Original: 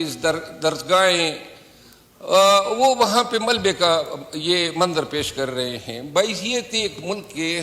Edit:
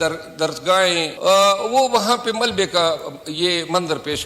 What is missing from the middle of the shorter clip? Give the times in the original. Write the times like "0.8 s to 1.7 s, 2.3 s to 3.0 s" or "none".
1.3 s to 2.2 s